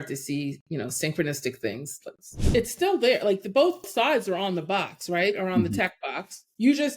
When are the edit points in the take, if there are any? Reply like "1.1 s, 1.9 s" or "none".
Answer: 2.4 s, 3.9 s